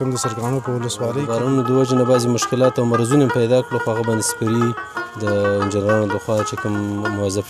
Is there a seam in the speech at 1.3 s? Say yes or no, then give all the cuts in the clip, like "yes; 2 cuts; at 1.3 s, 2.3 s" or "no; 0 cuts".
yes; 1 cut; at 1.3 s